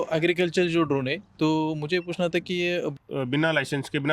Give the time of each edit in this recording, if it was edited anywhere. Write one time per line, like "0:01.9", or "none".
0:02.9